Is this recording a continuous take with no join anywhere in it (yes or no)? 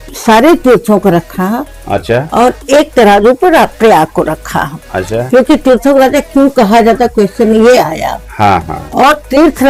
yes